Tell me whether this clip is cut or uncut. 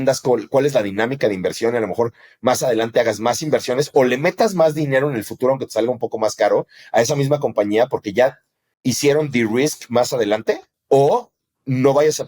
cut